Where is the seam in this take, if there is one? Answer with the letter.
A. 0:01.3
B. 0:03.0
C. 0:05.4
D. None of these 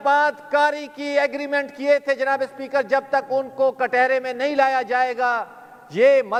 D